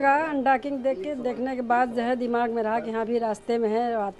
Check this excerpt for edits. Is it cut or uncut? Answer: uncut